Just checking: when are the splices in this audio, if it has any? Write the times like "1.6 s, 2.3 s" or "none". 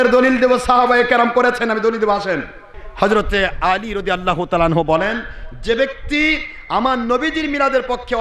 2.8 s